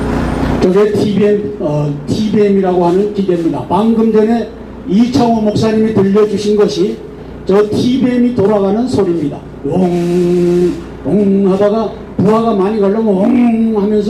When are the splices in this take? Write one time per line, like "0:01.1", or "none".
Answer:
none